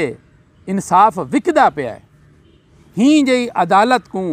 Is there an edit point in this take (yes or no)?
no